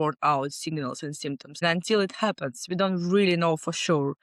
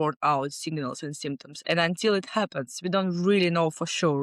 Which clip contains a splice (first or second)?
first